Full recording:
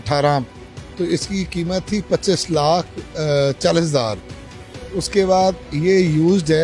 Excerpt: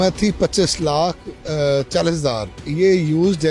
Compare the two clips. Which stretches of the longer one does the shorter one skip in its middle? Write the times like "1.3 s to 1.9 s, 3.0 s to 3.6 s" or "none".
4.3 s to 5.7 s